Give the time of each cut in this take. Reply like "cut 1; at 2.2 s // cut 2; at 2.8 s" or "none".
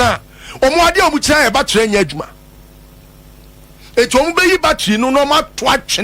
none